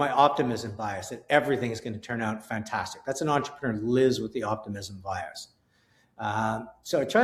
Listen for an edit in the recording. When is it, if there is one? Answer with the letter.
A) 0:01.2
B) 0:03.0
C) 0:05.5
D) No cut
D